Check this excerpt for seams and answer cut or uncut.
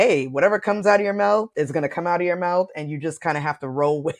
cut